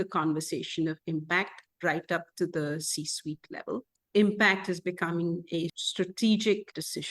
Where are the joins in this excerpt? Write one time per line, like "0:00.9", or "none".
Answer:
0:05.8